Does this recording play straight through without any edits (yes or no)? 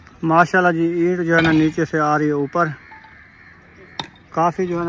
yes